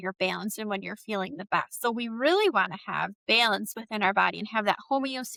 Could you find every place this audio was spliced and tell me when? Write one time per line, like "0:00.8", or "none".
none